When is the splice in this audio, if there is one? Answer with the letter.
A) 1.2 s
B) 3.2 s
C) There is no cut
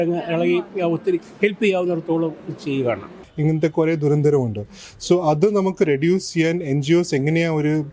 B